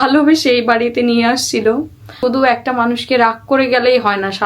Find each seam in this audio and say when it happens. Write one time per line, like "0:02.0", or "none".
0:02.1